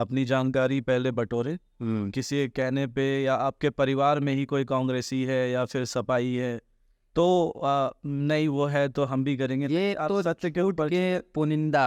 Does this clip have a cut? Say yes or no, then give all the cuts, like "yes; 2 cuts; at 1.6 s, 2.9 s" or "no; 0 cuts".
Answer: no; 0 cuts